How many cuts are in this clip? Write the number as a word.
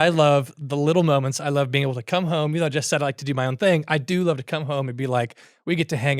zero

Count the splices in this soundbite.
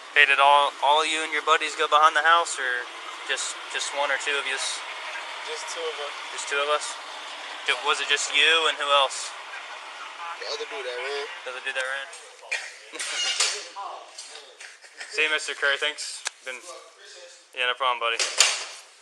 one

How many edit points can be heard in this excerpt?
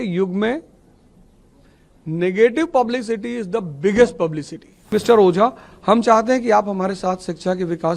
one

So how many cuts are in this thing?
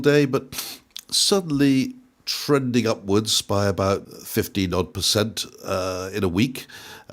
one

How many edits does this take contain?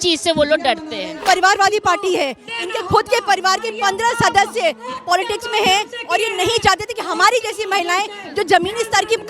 one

